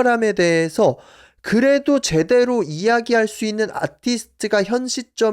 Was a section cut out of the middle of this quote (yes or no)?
no